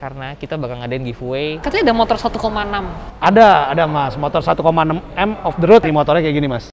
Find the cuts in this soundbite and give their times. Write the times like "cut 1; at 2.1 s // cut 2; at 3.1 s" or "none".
cut 1; at 1.6 s // cut 2; at 5.8 s